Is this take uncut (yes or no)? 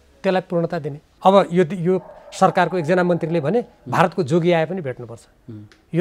no